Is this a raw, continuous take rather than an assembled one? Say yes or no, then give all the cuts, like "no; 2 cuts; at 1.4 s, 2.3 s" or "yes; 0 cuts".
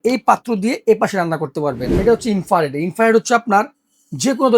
no; 1 cut; at 2.0 s